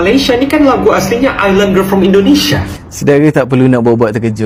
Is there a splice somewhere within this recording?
no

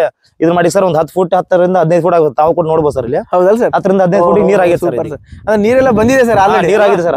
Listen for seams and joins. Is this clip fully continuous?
yes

